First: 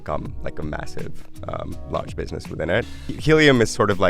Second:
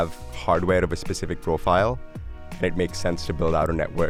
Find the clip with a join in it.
first; 1 cut; at 3.1 s

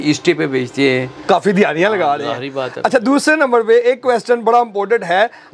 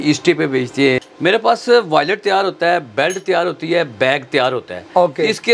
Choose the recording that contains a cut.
second; 1 cut; at 1.1 s

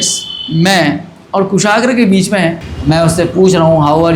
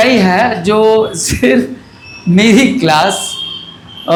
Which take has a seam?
first; 1 cut; at 2.7 s

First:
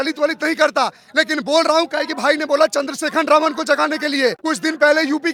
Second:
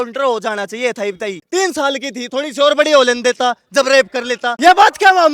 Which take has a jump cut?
second; 2 cuts; at 1.4 s, 4.5 s

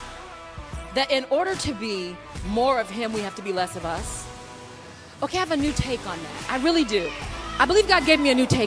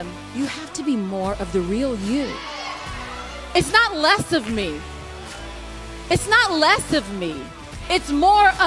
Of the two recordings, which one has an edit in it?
first; 1 cut; at 0.9 s

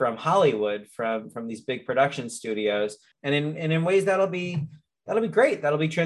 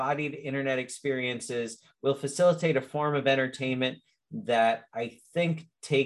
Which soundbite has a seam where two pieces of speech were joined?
first; 1 cut; at 3.1 s

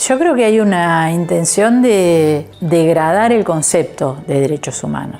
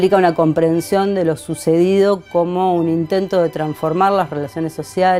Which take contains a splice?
first; 1 cut; at 2.5 s

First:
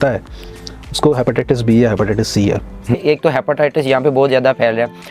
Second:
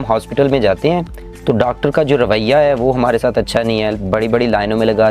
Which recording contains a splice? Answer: first; 1 cut; at 2.9 s

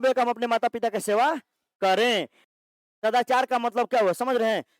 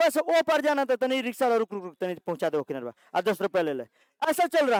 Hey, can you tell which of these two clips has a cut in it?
first; 1 cut; at 2.4 s

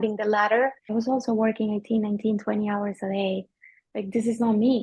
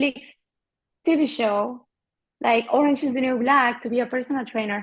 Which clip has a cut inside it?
first; 2 cuts; at 0.9 s, 3.8 s

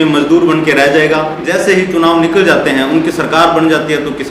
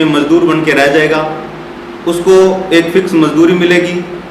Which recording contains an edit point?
first; 1 cut; at 1.5 s

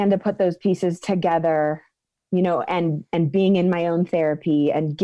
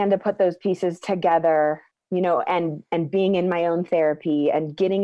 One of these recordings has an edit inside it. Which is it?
second; 1 cut; at 1.9 s

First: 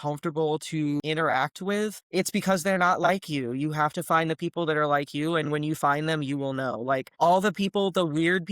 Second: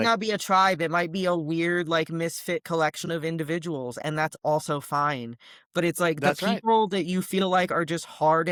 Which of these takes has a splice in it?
first; 3 cuts; at 1.0 s, 2.0 s, 7.1 s

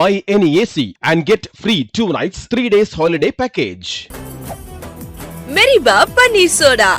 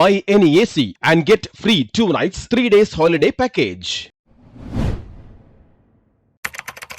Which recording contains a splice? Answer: first; 1 cut; at 4.0 s

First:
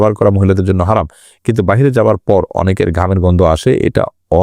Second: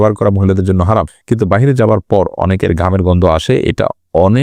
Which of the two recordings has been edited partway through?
second; 1 cut; at 1.2 s

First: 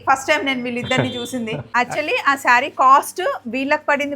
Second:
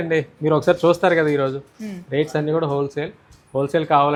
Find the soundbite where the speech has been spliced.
first; 1 cut; at 1.7 s

